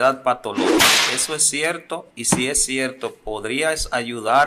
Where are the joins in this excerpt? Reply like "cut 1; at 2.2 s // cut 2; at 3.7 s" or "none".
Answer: cut 1; at 0.9 s